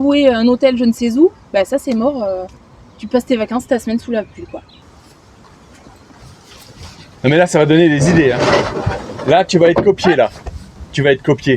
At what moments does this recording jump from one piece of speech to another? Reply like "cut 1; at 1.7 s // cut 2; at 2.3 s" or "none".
cut 1; at 4.8 s // cut 2; at 8.9 s